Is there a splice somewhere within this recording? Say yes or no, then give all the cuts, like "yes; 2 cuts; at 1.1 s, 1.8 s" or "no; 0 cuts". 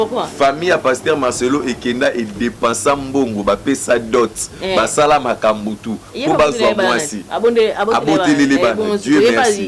no; 0 cuts